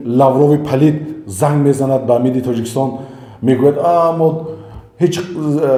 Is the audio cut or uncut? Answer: uncut